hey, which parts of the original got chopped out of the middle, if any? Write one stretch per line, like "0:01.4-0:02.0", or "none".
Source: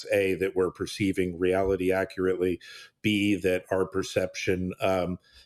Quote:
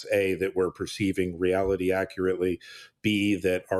none